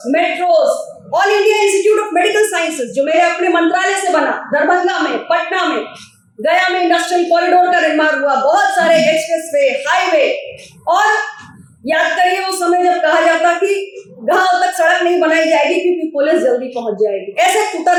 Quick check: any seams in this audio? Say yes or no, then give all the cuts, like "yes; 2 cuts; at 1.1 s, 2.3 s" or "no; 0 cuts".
no; 0 cuts